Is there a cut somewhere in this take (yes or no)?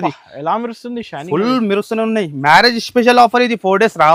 no